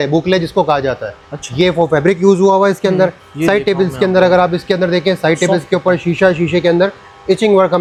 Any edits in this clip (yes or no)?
no